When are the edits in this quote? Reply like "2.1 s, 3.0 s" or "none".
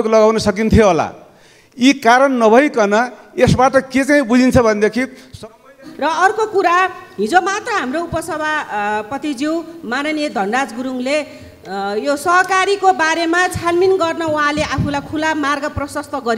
5.9 s